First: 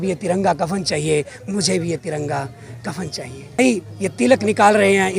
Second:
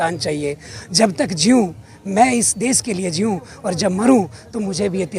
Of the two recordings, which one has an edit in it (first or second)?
first